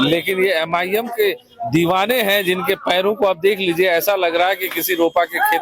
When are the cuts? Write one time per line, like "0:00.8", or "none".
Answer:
none